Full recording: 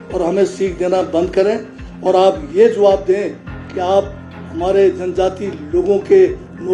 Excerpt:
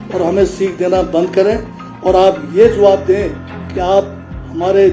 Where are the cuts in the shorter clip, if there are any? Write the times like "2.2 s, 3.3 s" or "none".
none